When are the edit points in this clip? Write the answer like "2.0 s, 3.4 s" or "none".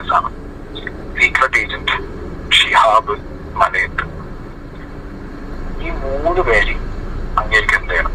none